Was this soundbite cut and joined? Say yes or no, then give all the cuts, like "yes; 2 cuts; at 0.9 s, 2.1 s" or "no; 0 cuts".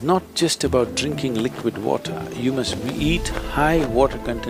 no; 0 cuts